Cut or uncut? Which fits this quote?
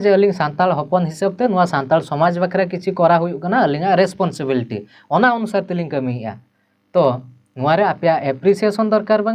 uncut